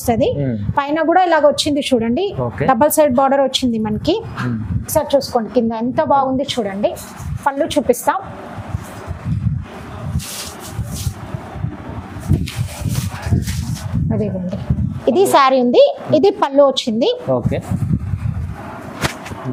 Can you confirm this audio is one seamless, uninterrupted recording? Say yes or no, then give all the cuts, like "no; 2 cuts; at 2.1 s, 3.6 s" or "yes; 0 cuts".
yes; 0 cuts